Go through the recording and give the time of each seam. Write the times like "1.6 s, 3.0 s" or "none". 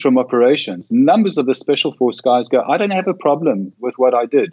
none